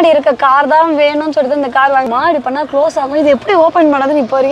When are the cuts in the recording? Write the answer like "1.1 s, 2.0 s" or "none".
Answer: 2.1 s